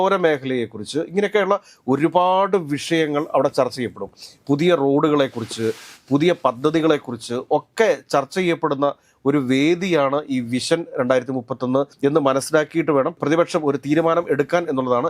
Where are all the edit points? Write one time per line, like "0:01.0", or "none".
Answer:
none